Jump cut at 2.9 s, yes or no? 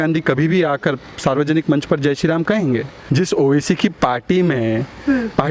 yes